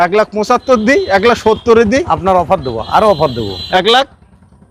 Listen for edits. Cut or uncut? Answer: uncut